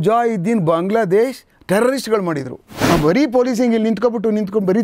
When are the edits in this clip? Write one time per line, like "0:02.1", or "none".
0:02.7